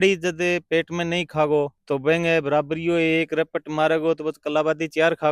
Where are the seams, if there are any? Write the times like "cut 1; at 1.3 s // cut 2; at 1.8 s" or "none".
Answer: none